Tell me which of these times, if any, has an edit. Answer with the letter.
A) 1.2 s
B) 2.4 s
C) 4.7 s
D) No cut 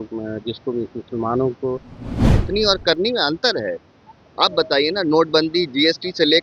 B